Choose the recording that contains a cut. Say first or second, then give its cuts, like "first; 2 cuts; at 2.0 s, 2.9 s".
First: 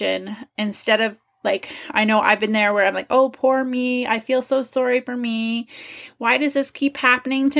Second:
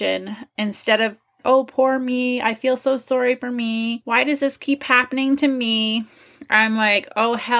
second; 2 cuts; at 1.4 s, 4.0 s